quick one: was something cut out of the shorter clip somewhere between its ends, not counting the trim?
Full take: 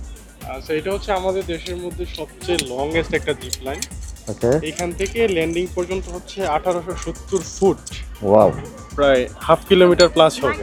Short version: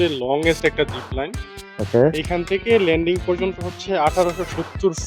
no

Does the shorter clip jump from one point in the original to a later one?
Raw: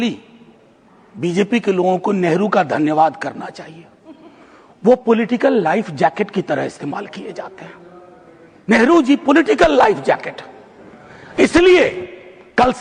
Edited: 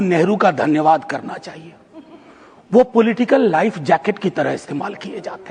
no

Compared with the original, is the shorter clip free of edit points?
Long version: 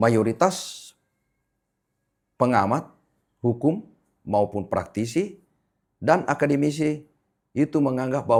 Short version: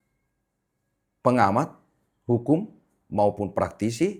yes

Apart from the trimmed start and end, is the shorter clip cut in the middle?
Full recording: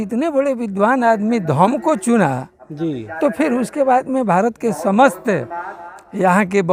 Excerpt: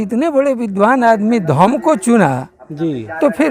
no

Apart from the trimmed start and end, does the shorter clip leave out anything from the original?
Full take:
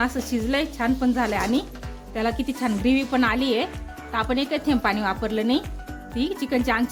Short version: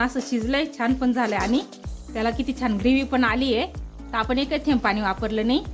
no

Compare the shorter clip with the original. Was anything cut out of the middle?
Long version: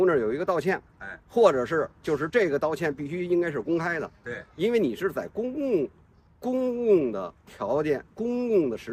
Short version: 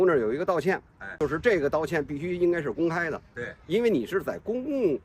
yes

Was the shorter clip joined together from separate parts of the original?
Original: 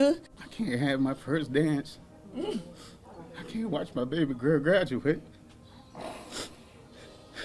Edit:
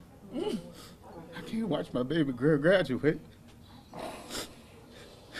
no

